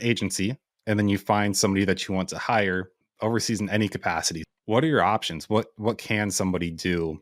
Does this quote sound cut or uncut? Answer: cut